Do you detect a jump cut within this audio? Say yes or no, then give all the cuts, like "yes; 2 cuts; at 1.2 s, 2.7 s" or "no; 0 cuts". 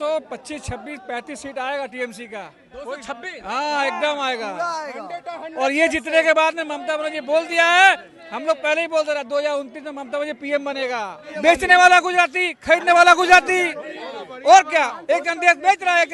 yes; 1 cut; at 11.2 s